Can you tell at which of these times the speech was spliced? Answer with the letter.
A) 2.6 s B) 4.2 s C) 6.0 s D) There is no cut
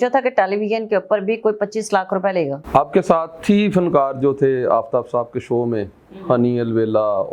A